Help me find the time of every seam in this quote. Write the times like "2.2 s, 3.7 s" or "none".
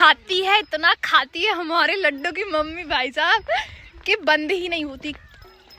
none

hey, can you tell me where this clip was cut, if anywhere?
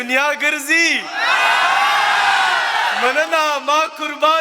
none

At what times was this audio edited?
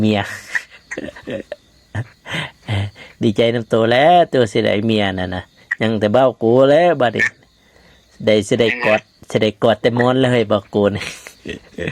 none

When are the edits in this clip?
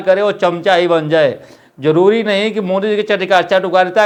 none

